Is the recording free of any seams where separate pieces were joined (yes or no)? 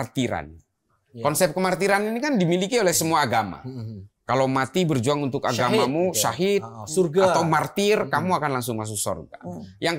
no